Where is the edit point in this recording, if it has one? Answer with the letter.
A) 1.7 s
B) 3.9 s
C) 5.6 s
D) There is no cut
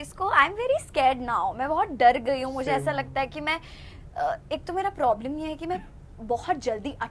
D